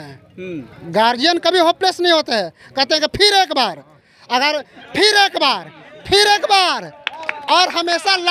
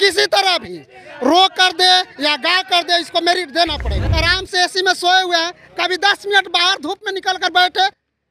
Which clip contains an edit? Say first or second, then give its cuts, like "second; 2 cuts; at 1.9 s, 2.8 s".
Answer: second; 1 cut; at 4.0 s